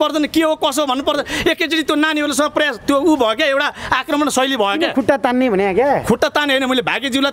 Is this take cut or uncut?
uncut